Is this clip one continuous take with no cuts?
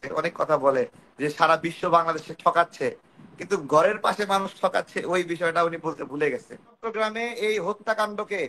no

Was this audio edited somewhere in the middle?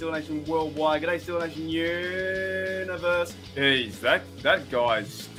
no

